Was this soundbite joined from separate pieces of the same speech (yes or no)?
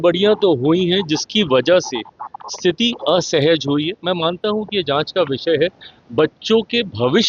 no